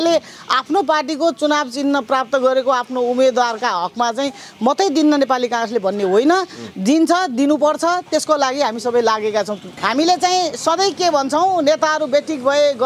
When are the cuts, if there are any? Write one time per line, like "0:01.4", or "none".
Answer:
0:09.6